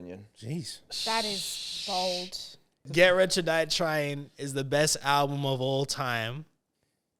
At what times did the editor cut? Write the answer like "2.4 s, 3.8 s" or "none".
2.8 s